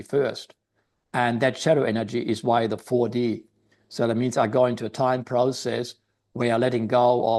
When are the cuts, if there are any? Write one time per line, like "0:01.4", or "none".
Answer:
none